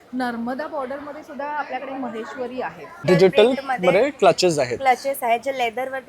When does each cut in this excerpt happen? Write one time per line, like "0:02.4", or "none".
0:03.0